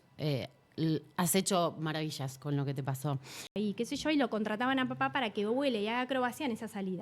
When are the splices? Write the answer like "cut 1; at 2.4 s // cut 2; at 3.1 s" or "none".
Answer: cut 1; at 3.5 s